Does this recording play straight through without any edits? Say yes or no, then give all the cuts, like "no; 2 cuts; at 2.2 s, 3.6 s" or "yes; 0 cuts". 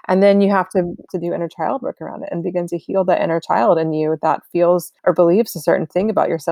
no; 2 cuts; at 1.1 s, 4.9 s